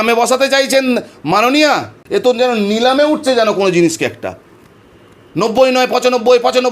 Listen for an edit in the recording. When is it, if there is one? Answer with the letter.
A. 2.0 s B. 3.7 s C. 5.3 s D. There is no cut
A